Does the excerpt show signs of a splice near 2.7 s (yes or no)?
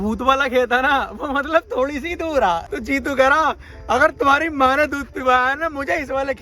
yes